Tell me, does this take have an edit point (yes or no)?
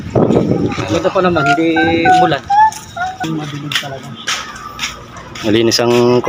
no